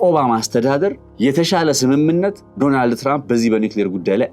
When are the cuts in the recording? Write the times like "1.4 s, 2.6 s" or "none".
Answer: 1.0 s, 2.4 s